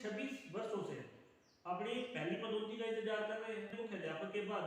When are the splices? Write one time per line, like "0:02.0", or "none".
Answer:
0:03.7